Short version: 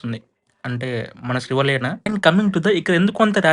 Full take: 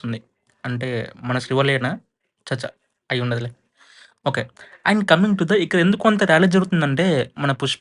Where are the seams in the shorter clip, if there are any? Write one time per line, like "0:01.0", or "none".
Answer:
0:02.1